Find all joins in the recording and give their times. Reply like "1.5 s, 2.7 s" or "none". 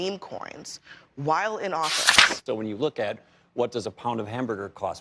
2.4 s